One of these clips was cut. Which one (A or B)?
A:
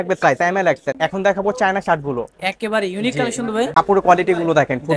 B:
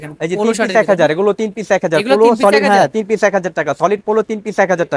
A